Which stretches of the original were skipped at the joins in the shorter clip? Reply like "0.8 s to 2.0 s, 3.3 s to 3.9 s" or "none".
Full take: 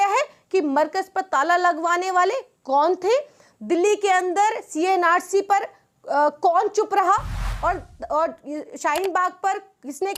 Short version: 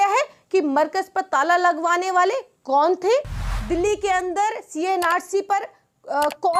none

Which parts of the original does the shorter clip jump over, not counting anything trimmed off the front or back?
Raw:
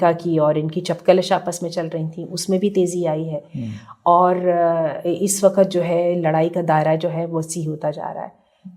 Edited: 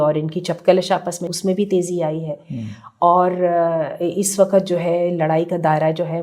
1.6 s to 2.3 s

